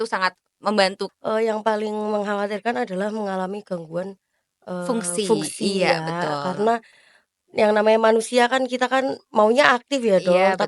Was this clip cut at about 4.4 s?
no; 1 cut; at 1.0 s

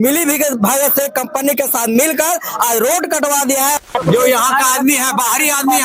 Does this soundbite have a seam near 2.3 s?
no; 1 cut; at 3.9 s

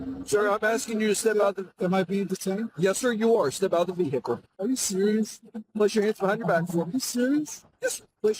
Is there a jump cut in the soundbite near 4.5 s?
yes; 1 cut; at 4.5 s

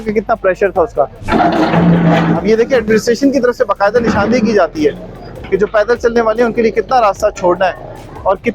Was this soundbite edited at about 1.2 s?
yes; 1 cut; at 1.2 s

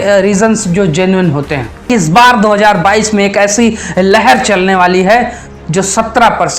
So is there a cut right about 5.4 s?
no; 1 cut; at 1.9 s

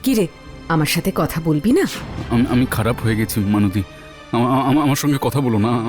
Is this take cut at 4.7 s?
no; 1 cut; at 2.1 s

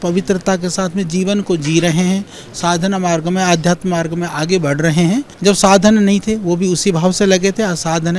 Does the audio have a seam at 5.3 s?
yes; 1 cut; at 5.3 s

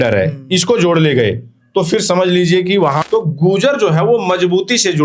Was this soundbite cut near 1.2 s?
no; 1 cut; at 3.0 s

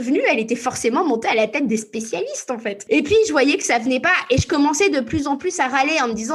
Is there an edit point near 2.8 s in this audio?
yes; 1 cut; at 2.8 s

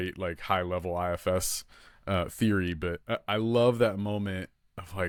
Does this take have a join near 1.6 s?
no; 0 cuts

